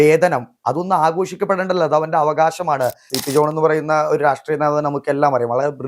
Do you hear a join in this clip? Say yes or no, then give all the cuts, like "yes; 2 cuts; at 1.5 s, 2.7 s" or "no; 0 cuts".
yes; 1 cut; at 3.1 s